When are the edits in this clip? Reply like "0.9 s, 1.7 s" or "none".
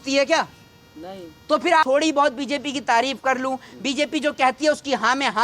1.8 s